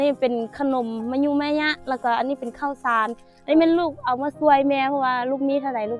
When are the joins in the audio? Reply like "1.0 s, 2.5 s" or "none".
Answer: none